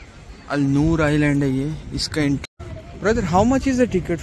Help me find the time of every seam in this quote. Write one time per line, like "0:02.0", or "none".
0:02.5